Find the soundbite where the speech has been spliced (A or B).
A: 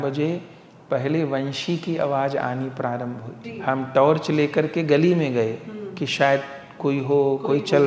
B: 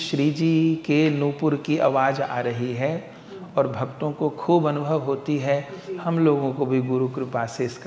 A